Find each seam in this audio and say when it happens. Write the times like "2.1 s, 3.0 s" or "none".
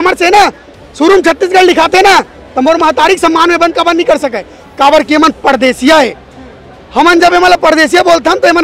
none